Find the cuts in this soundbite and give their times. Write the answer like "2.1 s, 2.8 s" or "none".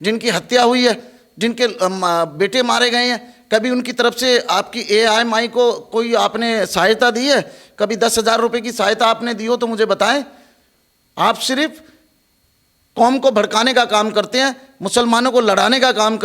none